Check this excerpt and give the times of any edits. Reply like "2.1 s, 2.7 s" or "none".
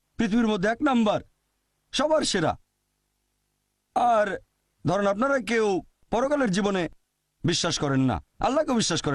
7.6 s

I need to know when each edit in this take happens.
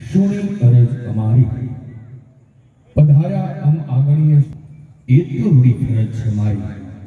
4.5 s

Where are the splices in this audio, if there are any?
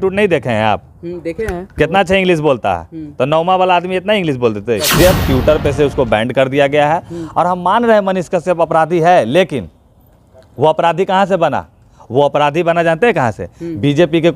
4.9 s

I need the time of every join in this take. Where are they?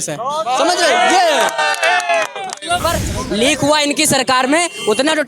2.8 s

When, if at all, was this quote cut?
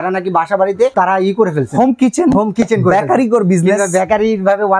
0.9 s

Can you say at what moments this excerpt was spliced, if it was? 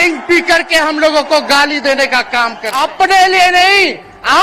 2.6 s

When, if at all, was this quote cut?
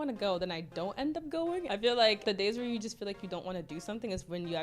1.7 s, 2.2 s

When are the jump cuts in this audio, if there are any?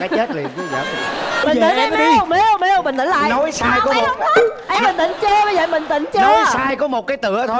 1.4 s

